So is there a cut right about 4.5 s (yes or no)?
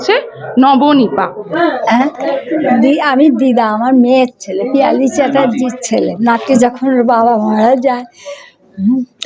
no